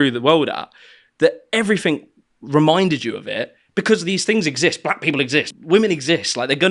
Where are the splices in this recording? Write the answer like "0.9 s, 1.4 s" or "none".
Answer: 5.6 s